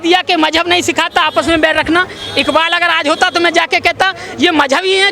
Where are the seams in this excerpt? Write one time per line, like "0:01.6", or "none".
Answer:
none